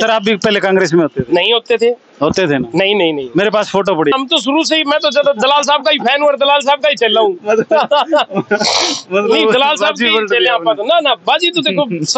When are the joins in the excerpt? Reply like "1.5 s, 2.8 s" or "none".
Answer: 4.1 s